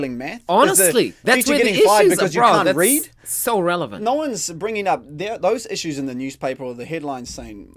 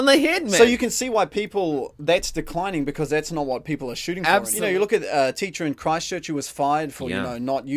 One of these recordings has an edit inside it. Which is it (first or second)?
second